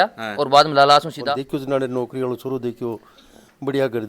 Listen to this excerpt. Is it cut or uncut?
cut